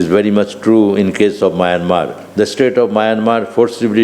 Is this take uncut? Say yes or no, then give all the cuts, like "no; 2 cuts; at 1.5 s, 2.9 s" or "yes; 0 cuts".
no; 1 cut; at 2.2 s